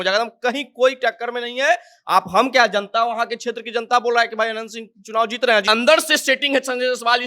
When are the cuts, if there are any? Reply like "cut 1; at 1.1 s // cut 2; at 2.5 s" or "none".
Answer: cut 1; at 5.6 s